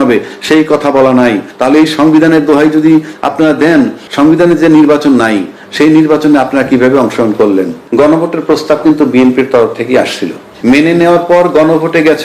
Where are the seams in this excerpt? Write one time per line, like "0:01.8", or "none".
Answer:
0:01.5
0:04.0
0:07.8
0:10.4